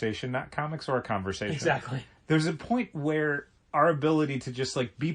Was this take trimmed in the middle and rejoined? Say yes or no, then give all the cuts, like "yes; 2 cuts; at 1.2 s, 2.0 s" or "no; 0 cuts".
no; 0 cuts